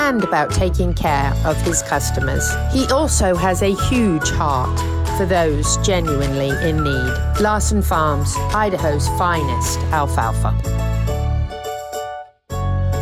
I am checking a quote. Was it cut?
no; 0 cuts

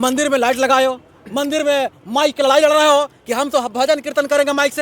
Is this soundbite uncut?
yes; 0 cuts

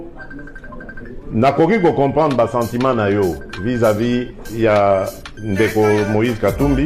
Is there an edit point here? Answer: no; 0 cuts

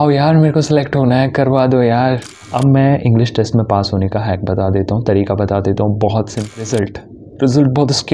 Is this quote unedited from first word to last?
no; 2 cuts; at 2.4 s, 6.6 s

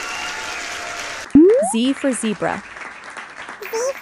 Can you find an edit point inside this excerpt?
no; 0 cuts

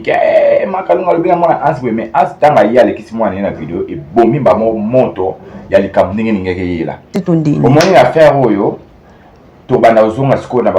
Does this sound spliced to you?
yes; 1 cut; at 7.1 s

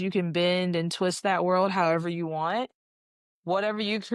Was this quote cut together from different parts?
no; 0 cuts

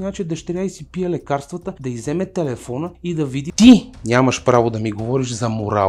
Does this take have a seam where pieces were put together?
yes; 2 cuts; at 1.7 s, 3.1 s

